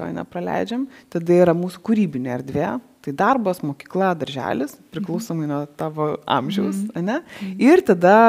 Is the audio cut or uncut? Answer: uncut